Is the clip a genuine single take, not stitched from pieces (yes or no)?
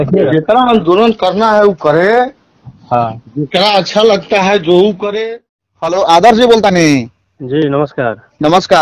no